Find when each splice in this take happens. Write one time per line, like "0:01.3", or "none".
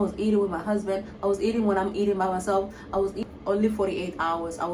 0:03.2

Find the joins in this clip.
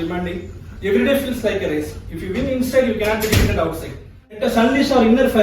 0:04.4

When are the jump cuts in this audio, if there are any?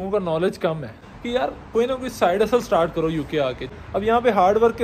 0:01.0
0:03.7

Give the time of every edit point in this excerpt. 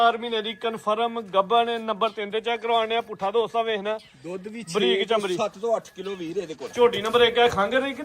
0:06.6

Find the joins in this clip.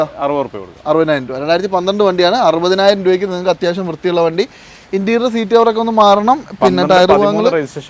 none

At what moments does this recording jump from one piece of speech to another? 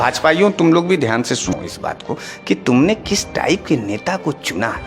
0:01.5

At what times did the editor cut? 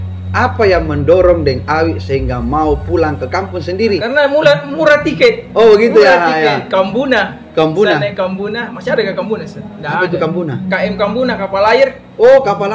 0:04.0

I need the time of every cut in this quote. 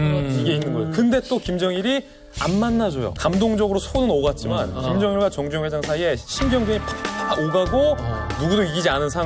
0:03.1

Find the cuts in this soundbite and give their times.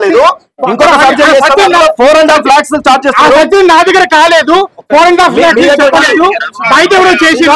none

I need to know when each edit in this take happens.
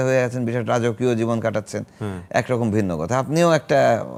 none

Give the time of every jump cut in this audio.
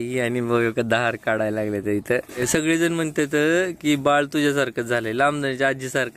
0:02.4

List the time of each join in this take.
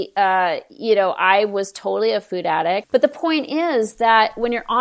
0:02.8

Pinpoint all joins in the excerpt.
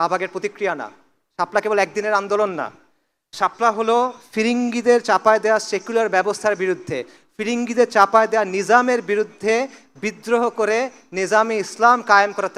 none

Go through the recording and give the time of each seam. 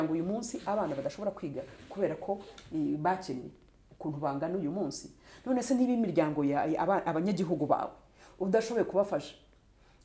none

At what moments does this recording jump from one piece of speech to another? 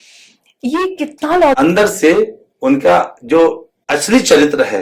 0:01.6
0:03.7

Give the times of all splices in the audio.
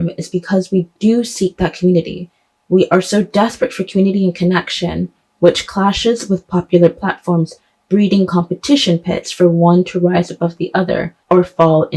none

